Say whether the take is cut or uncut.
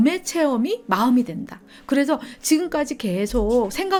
uncut